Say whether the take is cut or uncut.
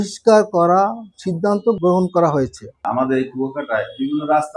cut